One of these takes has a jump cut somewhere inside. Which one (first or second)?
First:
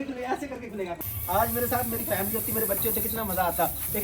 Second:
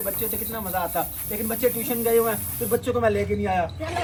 first